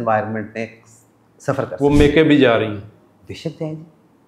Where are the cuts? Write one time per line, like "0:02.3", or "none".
none